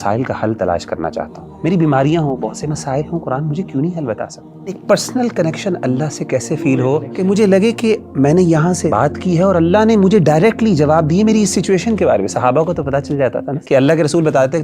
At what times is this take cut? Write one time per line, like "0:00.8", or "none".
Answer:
0:01.4
0:04.8
0:07.1
0:08.9
0:13.5